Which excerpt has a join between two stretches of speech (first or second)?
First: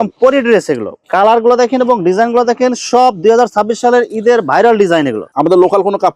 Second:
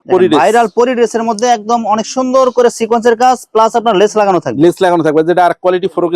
first